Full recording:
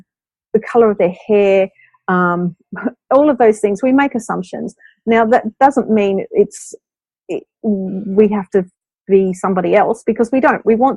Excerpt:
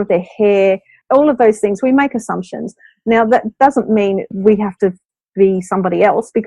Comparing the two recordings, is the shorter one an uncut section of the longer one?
no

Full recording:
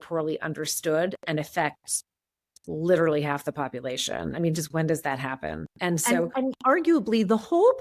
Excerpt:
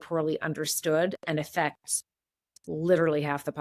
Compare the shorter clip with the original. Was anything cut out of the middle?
no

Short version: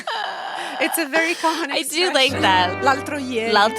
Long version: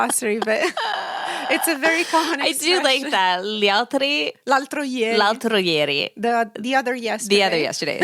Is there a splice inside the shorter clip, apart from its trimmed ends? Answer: yes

